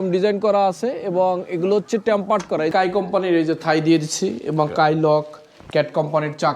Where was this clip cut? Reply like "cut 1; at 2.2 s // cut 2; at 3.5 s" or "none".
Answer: cut 1; at 2.7 s